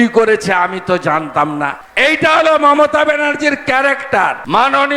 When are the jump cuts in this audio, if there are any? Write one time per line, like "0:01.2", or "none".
none